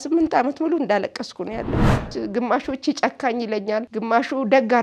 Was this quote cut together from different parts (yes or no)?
yes